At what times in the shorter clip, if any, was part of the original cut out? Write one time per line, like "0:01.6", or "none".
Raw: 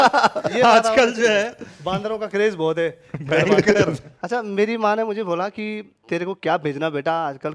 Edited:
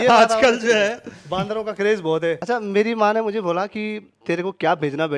0:02.4